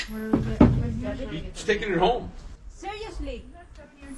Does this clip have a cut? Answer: no; 0 cuts

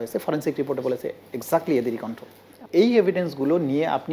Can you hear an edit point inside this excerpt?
yes; 1 cut; at 2.7 s

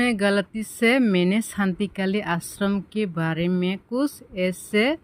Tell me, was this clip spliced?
no; 0 cuts

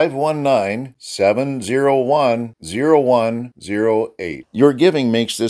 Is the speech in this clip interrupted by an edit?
no; 0 cuts

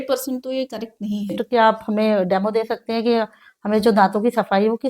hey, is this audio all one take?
no; 1 cut; at 1.4 s

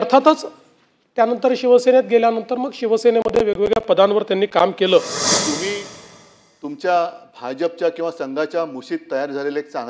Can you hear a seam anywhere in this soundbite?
yes; 1 cut; at 5.2 s

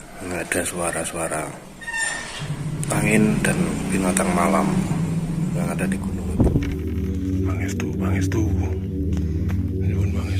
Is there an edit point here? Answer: yes; 1 cut; at 6.2 s

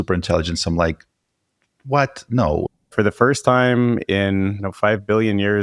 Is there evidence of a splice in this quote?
yes; 2 cuts; at 2.9 s, 4.6 s

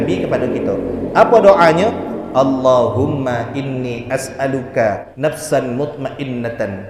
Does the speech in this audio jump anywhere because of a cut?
yes; 1 cut; at 5.1 s

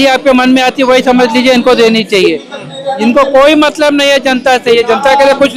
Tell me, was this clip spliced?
no; 0 cuts

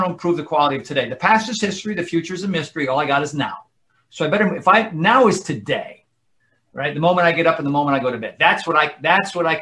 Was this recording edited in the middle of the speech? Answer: no; 0 cuts

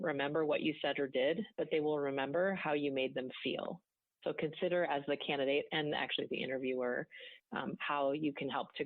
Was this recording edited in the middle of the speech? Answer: no; 0 cuts

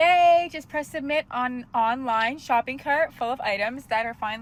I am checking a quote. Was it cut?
no; 0 cuts

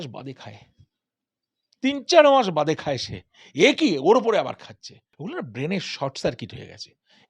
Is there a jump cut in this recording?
yes; 1 cut; at 5.1 s

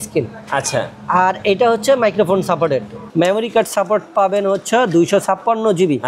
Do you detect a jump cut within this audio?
yes; 1 cut; at 3.0 s

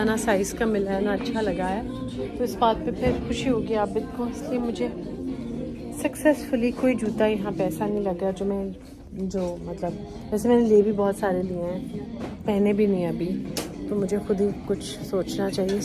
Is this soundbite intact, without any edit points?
yes; 0 cuts

